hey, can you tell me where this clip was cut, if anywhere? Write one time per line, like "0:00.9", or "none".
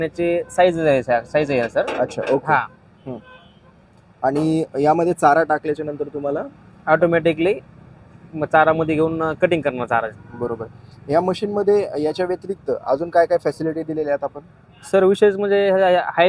none